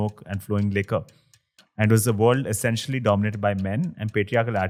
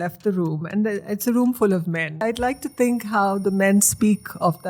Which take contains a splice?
second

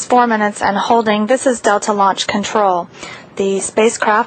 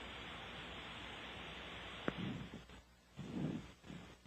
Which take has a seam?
second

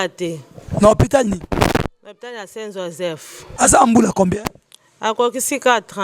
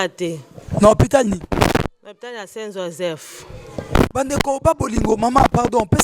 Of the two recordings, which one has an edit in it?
first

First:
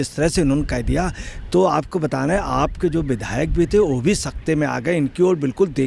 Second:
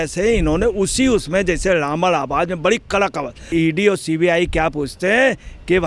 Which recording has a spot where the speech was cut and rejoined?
second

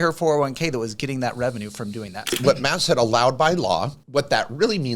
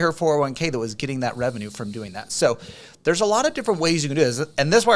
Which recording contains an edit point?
first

